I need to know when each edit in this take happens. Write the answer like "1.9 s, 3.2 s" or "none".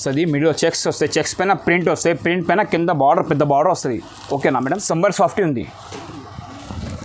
4.8 s